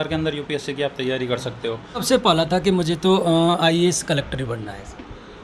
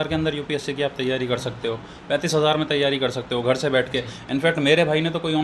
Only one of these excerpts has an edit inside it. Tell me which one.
first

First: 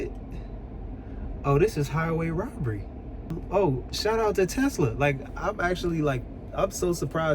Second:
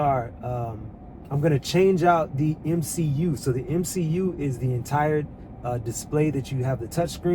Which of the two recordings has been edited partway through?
first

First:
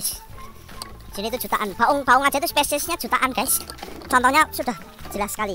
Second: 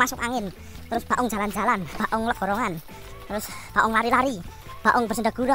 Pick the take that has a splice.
second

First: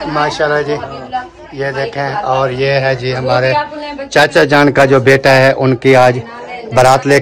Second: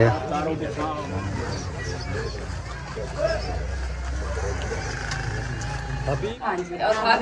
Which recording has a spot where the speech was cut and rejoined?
second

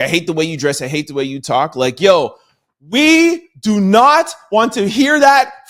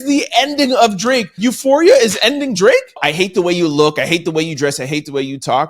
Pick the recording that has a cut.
second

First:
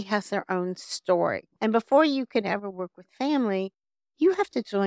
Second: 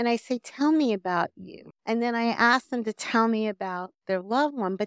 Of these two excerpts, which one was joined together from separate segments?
first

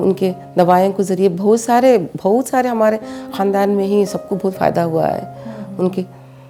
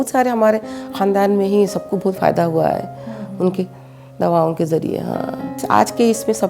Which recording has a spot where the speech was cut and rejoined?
second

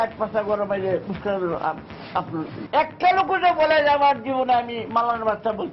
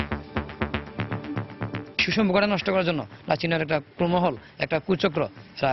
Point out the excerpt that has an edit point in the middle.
second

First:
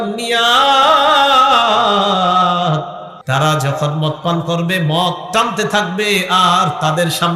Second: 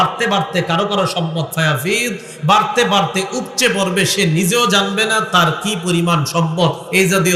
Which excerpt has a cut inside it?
first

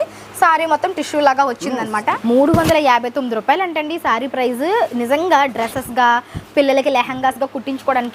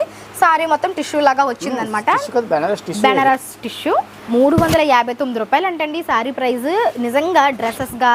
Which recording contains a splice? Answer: first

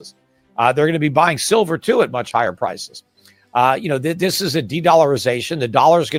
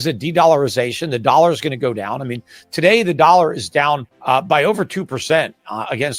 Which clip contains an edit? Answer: second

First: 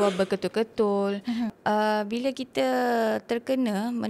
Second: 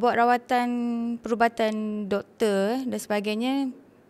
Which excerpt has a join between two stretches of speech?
first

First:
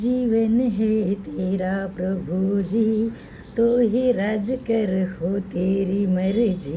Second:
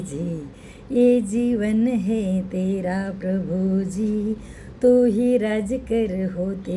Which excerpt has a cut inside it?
second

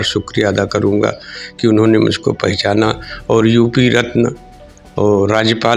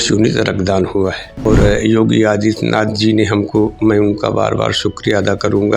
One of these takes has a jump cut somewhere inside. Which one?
second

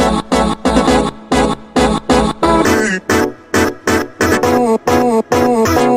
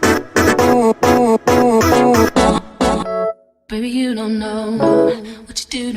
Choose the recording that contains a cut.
second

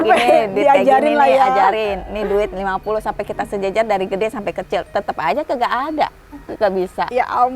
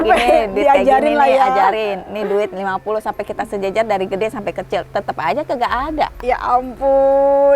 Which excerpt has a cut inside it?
second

